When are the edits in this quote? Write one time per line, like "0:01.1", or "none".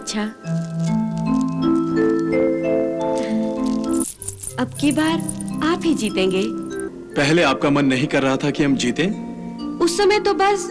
0:06.8